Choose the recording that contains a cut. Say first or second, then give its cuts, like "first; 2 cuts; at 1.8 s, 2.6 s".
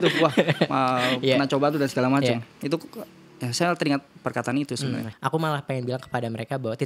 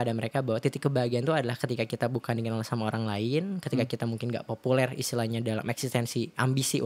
first; 1 cut; at 5.1 s